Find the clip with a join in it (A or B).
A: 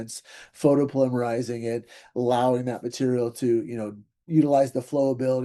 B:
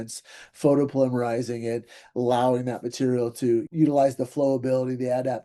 B